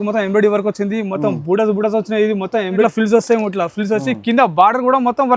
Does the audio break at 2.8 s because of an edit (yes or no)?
yes